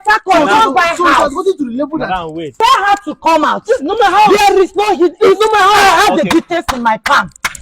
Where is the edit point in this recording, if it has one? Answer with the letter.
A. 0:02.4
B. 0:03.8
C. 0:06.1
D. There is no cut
A